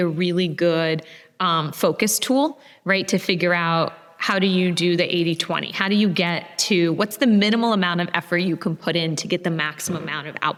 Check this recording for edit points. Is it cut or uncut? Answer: uncut